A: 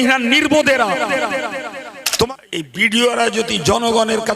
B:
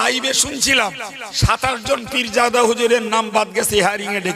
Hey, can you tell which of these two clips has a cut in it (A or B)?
A